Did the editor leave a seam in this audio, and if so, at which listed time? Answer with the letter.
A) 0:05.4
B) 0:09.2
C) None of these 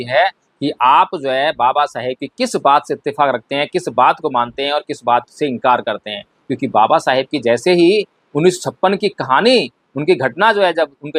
C